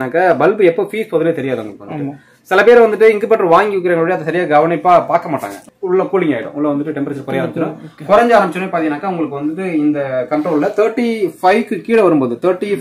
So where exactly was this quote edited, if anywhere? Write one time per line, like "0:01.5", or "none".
0:05.6